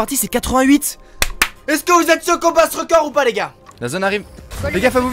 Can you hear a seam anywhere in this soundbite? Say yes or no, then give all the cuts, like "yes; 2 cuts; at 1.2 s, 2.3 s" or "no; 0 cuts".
yes; 1 cut; at 3.6 s